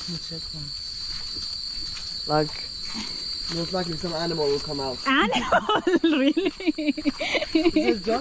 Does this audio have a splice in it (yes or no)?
no